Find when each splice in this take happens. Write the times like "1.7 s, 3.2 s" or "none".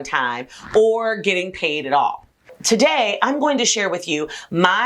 2.5 s